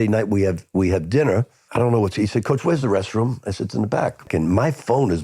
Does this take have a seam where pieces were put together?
yes; 2 cuts; at 1.6 s, 4.3 s

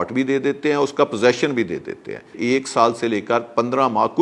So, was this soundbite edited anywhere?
yes; 1 cut; at 2.4 s

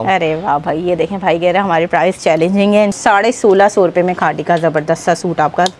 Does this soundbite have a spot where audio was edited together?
yes; 1 cut; at 3.0 s

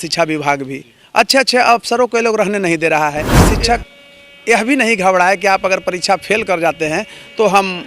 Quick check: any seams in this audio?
yes; 1 cut; at 3.4 s

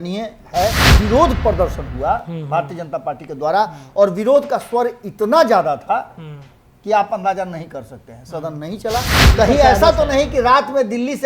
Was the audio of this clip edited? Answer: yes; 2 cuts; at 1.0 s, 9.2 s

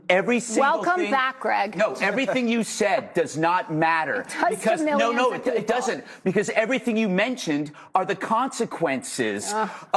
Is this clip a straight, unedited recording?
yes; 0 cuts

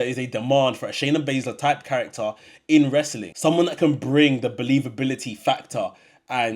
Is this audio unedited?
no; 1 cut; at 3.2 s

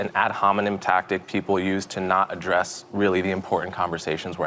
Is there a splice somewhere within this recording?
no; 0 cuts

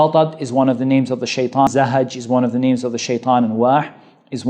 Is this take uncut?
no; 1 cut; at 1.7 s

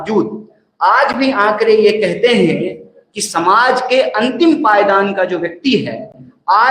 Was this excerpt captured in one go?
yes; 0 cuts

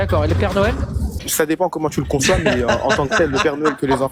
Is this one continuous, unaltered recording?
no; 1 cut; at 1.2 s

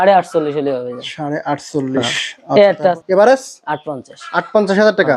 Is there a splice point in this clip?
yes; 1 cut; at 3.0 s

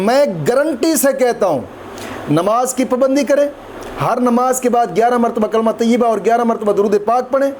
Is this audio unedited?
yes; 0 cuts

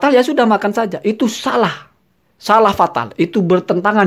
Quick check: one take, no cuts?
yes; 0 cuts

